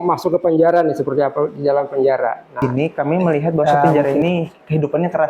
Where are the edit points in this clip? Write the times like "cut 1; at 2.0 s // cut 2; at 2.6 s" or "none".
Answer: cut 1; at 2.6 s